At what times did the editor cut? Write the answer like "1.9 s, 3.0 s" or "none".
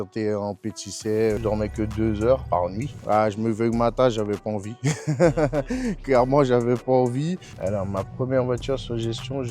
1.4 s, 2.5 s, 7.5 s